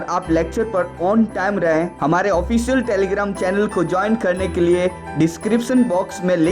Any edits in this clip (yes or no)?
yes